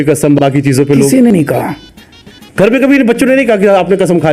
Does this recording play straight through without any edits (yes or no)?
yes